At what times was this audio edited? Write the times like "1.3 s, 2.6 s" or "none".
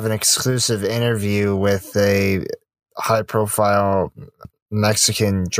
4.5 s